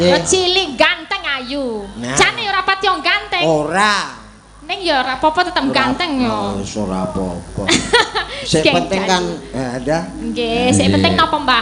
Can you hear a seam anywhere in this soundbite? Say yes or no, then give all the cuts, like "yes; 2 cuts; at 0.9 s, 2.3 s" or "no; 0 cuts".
no; 0 cuts